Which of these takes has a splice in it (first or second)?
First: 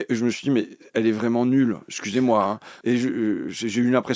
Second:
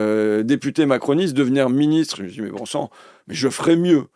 first